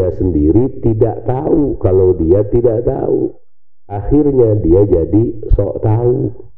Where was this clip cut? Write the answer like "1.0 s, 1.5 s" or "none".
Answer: none